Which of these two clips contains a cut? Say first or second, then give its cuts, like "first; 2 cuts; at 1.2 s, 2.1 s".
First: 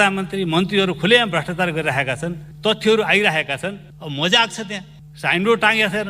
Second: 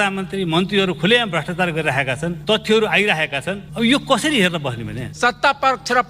second; 3 cuts; at 2.4 s, 3.6 s, 5.0 s